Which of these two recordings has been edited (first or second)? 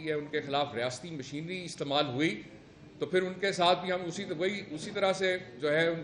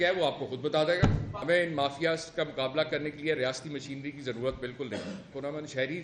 second